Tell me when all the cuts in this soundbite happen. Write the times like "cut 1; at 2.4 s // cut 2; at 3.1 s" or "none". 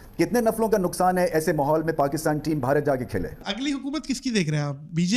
cut 1; at 3.5 s